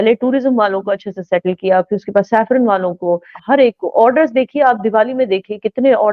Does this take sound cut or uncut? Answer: cut